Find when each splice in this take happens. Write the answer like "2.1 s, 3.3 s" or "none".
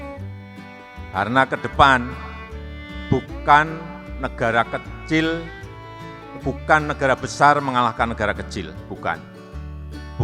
1.1 s